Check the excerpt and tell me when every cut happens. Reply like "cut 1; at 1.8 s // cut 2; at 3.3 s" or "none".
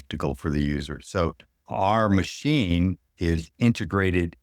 cut 1; at 1.5 s // cut 2; at 3.1 s

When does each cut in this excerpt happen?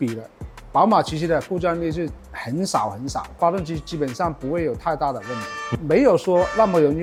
none

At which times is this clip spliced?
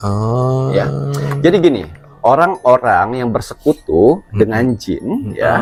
none

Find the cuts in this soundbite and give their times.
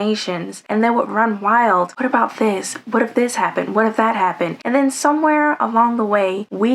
cut 1; at 1.9 s

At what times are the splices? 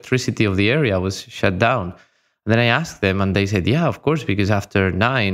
none

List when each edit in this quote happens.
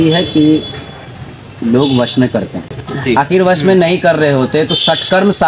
none

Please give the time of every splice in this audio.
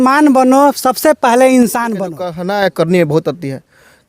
cut 1; at 2.4 s

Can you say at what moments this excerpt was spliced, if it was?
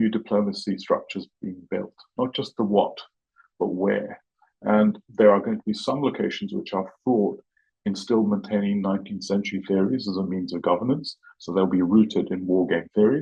none

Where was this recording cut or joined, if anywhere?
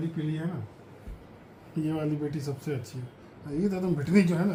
none

